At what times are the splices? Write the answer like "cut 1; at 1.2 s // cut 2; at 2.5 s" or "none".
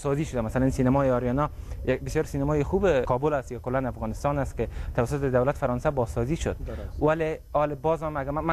none